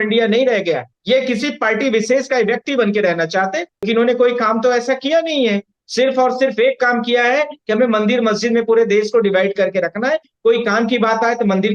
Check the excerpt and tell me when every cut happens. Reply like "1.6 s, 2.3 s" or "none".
0.9 s, 3.8 s